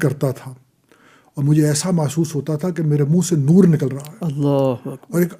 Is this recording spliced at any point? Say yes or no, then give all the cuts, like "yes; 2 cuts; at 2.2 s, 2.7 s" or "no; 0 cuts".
no; 0 cuts